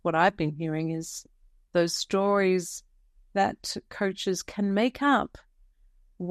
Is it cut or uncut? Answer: uncut